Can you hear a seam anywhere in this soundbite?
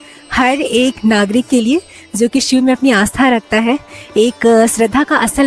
no; 0 cuts

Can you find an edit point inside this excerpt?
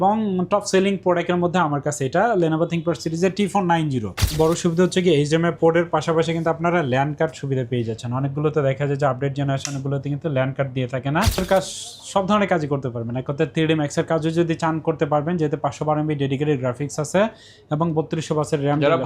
yes; 2 cuts; at 4.3 s, 11.4 s

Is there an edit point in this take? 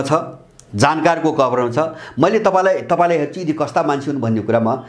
no; 0 cuts

